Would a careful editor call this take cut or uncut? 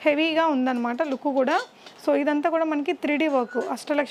uncut